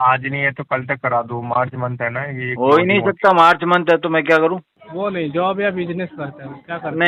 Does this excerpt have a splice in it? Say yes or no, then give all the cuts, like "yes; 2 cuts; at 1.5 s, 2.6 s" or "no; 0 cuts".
yes; 1 cut; at 4.8 s